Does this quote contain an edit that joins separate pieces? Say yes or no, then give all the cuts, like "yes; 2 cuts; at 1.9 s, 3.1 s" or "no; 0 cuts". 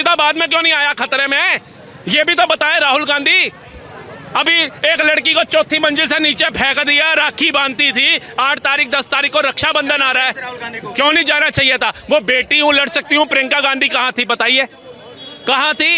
no; 0 cuts